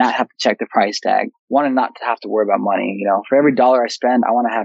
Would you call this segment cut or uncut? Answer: cut